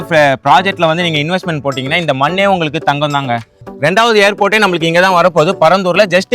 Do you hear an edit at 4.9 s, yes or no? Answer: no